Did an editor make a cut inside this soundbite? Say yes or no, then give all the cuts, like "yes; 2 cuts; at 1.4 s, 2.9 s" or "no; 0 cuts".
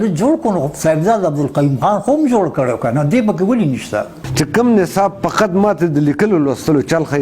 yes; 1 cut; at 4.2 s